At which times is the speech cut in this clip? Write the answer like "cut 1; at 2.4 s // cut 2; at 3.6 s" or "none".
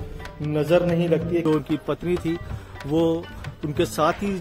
cut 1; at 1.4 s